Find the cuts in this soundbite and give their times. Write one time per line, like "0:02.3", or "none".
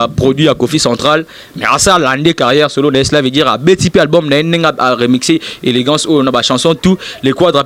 none